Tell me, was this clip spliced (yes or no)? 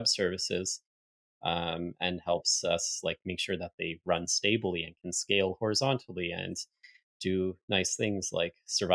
no